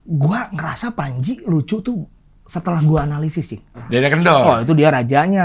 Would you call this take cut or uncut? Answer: cut